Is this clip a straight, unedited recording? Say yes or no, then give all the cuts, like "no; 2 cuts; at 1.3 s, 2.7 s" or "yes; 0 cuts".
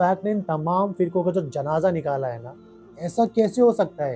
no; 1 cut; at 3.1 s